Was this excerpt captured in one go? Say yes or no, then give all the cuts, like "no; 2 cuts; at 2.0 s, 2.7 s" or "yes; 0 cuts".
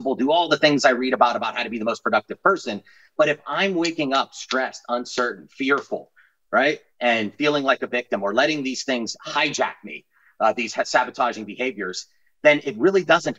yes; 0 cuts